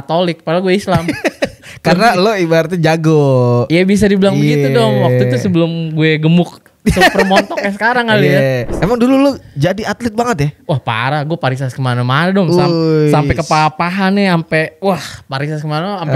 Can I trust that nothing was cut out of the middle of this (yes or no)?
no